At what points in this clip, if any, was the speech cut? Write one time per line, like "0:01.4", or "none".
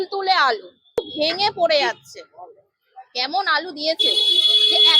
0:01.0